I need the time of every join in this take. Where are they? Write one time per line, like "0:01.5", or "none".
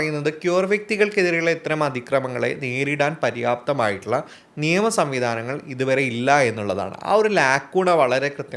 none